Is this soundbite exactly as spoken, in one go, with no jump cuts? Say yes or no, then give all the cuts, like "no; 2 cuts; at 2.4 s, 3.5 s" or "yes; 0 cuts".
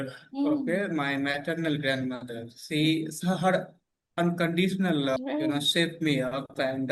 no; 1 cut; at 5.2 s